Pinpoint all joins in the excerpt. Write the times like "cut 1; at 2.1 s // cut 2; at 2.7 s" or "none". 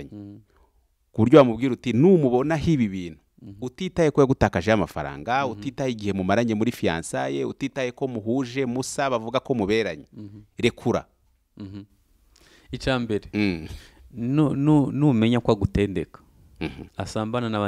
none